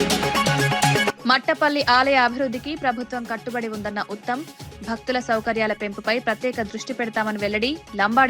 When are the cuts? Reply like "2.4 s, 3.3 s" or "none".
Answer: 1.2 s